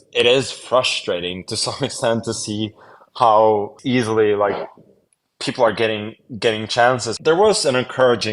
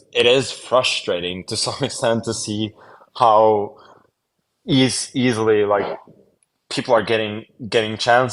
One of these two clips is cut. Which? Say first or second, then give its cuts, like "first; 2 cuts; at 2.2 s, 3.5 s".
first; 2 cuts; at 3.8 s, 7.1 s